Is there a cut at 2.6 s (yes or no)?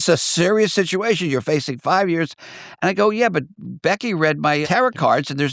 no